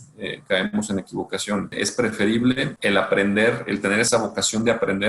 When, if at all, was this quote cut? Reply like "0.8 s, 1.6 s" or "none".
1.7 s, 2.7 s, 4.1 s